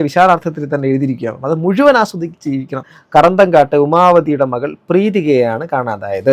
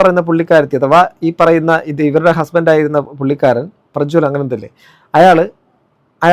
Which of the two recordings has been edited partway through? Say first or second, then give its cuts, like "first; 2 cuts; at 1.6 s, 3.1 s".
first; 1 cut; at 2.9 s